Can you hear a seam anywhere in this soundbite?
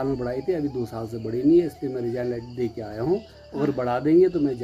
no; 0 cuts

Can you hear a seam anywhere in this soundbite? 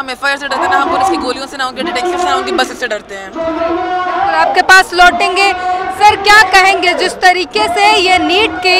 no; 0 cuts

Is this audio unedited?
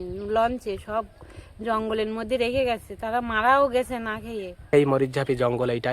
no; 1 cut; at 4.7 s

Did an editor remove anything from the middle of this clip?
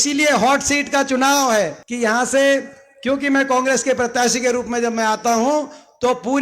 yes; 1 cut; at 1.8 s

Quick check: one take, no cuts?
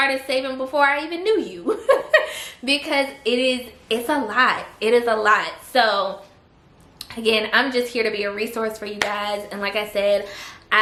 yes; 0 cuts

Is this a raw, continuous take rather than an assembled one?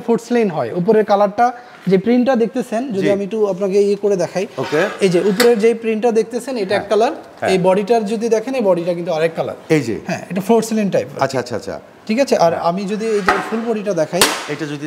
yes; 0 cuts

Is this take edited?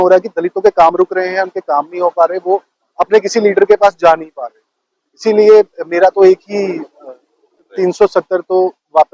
yes; 1 cut; at 7.7 s

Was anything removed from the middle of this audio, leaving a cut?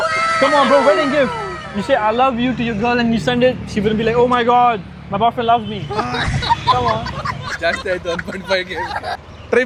no; 0 cuts

